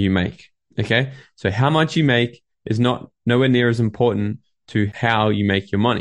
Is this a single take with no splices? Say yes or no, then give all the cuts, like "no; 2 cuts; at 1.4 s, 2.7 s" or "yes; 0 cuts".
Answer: yes; 0 cuts